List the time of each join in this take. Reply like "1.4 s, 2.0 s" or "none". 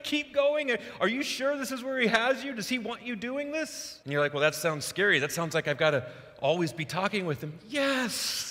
3.9 s